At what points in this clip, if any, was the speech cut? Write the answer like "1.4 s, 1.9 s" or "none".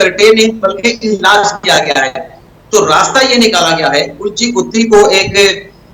2.5 s